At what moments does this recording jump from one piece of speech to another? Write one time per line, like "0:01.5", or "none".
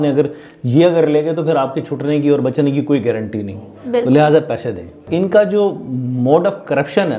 0:05.0